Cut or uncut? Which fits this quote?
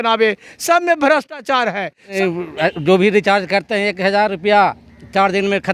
cut